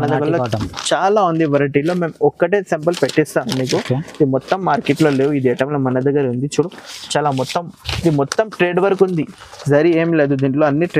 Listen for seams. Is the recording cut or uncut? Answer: uncut